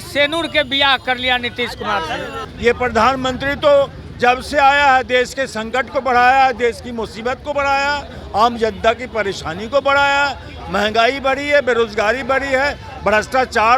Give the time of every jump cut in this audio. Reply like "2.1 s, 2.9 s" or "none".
2.4 s